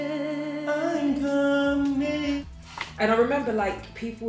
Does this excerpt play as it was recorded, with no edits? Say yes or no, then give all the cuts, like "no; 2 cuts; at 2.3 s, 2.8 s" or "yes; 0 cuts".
no; 1 cut; at 2.4 s